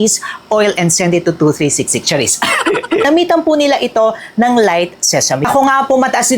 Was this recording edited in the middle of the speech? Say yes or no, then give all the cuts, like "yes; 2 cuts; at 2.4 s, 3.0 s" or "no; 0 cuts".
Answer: yes; 2 cuts; at 3.1 s, 5.4 s